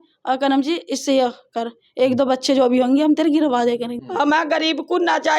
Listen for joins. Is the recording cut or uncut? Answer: cut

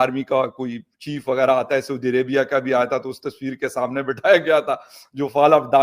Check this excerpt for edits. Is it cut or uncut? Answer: uncut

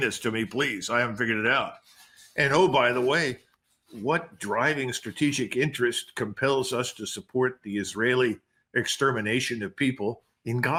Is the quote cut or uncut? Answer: uncut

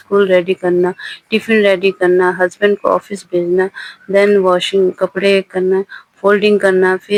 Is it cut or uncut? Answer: uncut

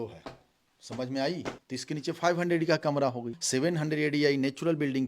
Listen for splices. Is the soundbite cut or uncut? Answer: cut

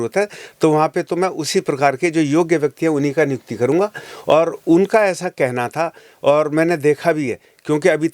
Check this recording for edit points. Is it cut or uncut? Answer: uncut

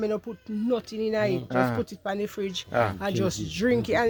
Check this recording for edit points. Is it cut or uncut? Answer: uncut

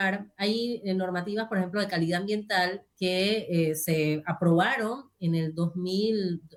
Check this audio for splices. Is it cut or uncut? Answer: uncut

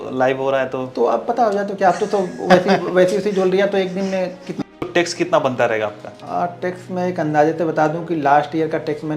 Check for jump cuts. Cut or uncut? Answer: cut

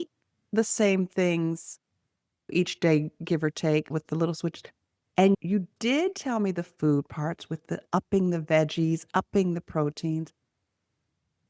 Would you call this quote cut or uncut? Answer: cut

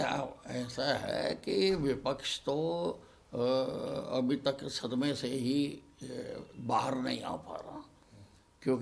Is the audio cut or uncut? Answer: uncut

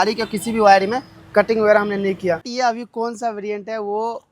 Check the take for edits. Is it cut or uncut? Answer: cut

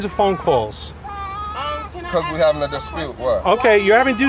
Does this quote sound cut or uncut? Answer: uncut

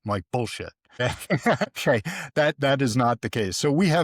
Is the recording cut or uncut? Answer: cut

